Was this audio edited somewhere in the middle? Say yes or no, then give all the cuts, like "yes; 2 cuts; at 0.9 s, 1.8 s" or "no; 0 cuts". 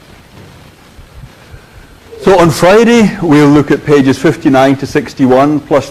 yes; 1 cut; at 3.8 s